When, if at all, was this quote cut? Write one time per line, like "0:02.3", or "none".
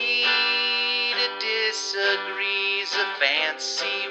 none